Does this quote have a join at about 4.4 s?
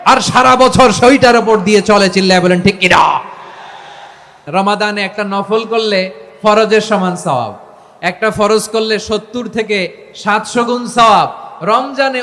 yes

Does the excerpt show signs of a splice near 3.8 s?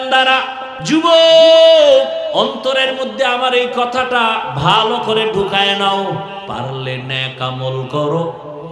no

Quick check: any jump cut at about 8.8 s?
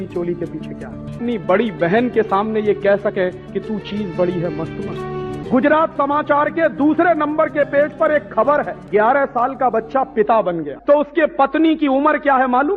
yes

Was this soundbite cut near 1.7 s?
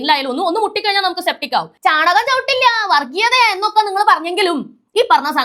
yes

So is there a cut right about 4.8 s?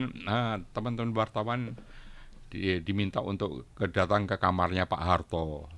no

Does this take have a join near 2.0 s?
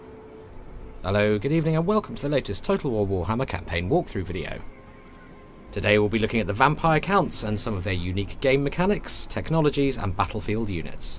no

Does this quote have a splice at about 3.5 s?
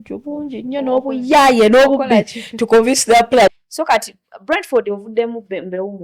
yes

